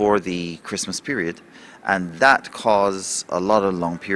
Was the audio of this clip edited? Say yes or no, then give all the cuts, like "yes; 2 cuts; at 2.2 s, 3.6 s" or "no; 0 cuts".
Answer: no; 0 cuts